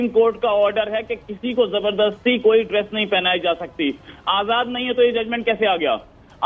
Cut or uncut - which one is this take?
uncut